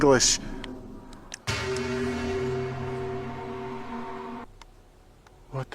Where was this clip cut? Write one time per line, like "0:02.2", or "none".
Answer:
0:04.6